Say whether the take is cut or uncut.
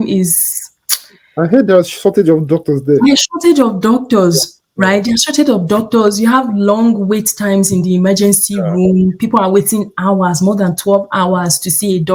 uncut